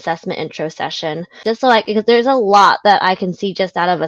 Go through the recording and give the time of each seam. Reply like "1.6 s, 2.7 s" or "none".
1.4 s